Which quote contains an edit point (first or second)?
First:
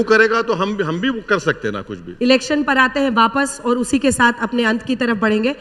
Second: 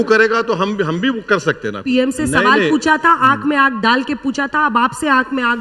second